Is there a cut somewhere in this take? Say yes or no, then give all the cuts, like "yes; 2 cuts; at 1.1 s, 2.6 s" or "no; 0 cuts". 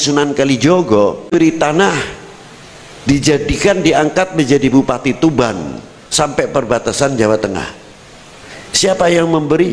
yes; 1 cut; at 1.3 s